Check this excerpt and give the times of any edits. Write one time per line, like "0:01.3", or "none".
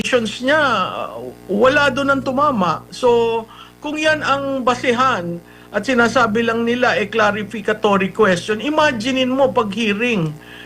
none